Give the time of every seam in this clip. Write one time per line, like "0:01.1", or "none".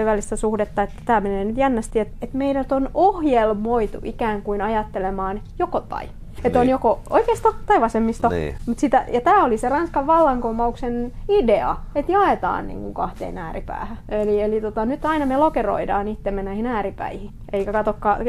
0:02.1
0:06.4
0:14.0
0:17.3